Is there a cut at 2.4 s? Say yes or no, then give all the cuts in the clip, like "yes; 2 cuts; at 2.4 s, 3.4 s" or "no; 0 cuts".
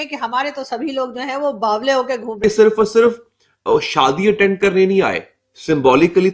yes; 1 cut; at 2.4 s